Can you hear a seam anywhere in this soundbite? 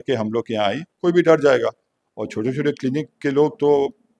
yes; 1 cut; at 0.9 s

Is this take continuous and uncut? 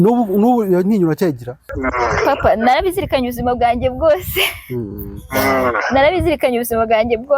no; 1 cut; at 1.7 s

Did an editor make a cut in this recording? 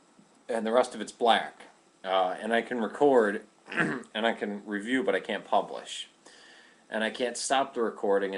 yes; 1 cut; at 3.1 s

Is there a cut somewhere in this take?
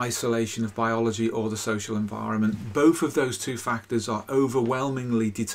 no; 0 cuts

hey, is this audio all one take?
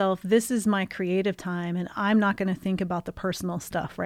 yes; 0 cuts

